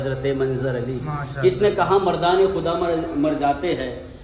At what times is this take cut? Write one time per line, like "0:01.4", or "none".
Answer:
none